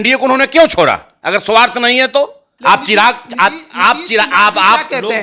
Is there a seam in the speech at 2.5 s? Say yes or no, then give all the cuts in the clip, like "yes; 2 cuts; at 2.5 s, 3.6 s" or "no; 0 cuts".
yes; 1 cut; at 2.5 s